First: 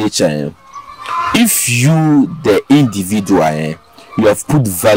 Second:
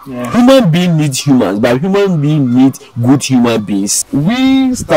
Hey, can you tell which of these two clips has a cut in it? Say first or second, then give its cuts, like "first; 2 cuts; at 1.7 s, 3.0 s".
second; 1 cut; at 4.0 s